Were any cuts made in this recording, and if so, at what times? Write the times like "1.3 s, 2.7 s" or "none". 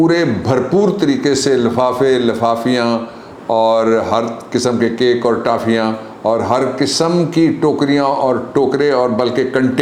none